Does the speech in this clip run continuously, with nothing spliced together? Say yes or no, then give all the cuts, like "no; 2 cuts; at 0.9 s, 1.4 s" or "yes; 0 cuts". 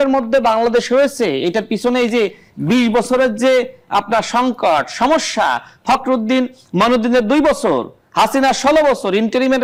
yes; 0 cuts